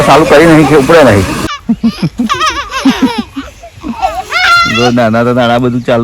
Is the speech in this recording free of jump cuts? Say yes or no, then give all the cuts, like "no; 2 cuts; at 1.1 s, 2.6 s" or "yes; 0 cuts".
no; 1 cut; at 1.5 s